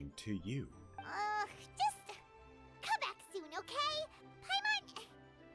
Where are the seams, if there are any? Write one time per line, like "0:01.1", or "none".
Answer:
0:00.9